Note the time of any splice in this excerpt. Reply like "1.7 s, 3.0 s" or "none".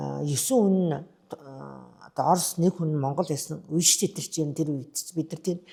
none